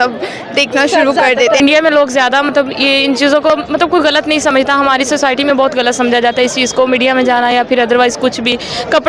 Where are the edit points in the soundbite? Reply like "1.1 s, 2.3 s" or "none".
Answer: 1.6 s